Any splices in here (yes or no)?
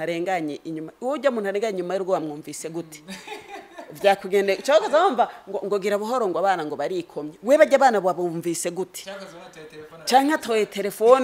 no